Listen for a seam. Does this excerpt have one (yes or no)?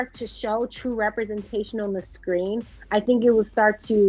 no